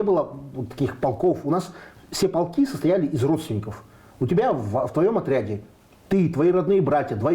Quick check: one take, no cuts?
yes; 0 cuts

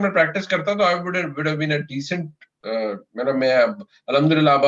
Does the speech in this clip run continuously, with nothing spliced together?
yes; 0 cuts

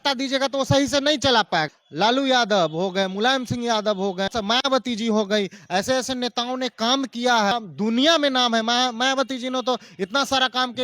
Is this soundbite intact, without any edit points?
no; 3 cuts; at 1.8 s, 4.3 s, 7.5 s

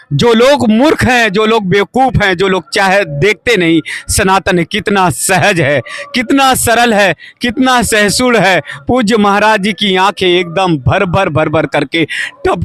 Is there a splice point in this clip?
no; 0 cuts

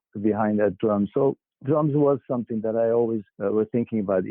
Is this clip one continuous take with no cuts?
no; 1 cut; at 3.3 s

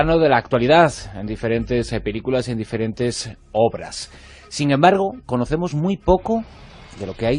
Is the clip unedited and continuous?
yes; 0 cuts

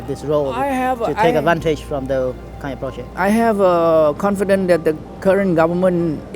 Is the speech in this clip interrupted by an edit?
yes; 1 cut; at 3.1 s

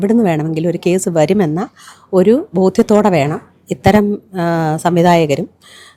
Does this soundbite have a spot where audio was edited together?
no; 0 cuts

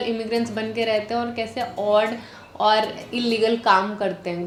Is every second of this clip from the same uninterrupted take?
yes; 0 cuts

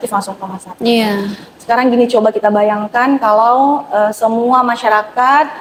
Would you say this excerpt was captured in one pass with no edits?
yes; 0 cuts

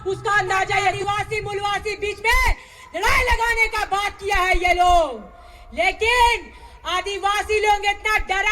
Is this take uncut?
no; 1 cut; at 1.0 s

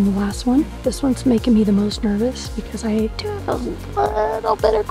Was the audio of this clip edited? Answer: yes; 2 cuts; at 0.8 s, 3.2 s

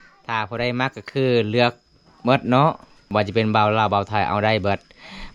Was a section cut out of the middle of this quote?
yes; 1 cut; at 2.9 s

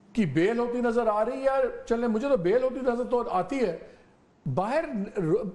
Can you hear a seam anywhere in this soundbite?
no; 0 cuts

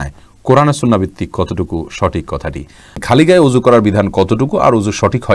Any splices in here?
yes; 1 cut; at 3.0 s

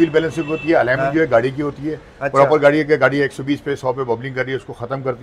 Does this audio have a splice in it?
no; 0 cuts

